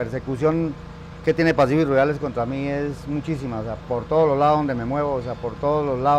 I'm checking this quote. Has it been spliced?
no; 0 cuts

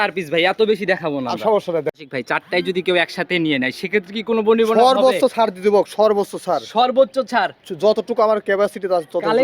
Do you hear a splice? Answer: yes; 1 cut; at 2.0 s

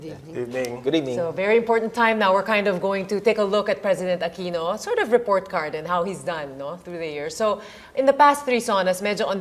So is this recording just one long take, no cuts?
yes; 0 cuts

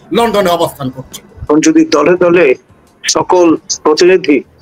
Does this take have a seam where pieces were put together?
yes; 1 cut; at 1.3 s

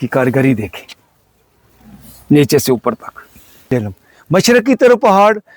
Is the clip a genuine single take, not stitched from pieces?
no; 1 cut; at 3.7 s

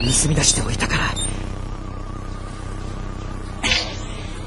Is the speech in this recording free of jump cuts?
no; 1 cut; at 1.9 s

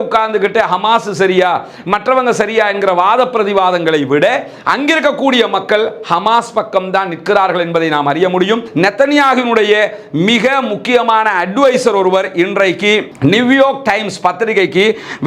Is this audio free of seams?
no; 1 cut; at 8.7 s

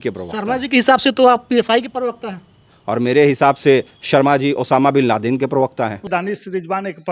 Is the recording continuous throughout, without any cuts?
no; 1 cut; at 6.0 s

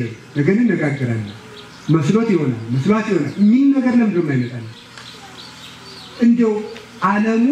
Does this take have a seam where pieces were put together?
no; 0 cuts

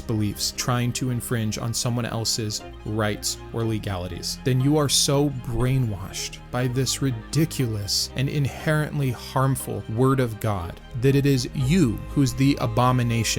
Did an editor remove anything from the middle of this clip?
no; 0 cuts

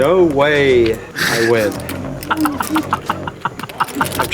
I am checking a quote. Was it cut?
yes; 1 cut; at 1.1 s

